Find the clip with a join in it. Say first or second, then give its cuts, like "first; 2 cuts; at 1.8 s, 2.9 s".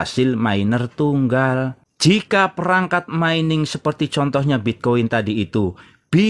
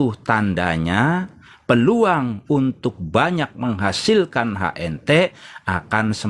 first; 1 cut; at 1.8 s